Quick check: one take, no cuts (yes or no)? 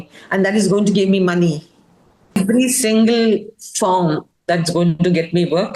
no